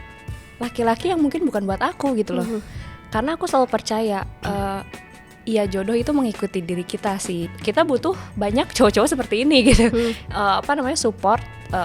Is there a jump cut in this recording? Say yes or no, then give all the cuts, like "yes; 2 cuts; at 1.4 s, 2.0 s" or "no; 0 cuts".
yes; 1 cut; at 7.5 s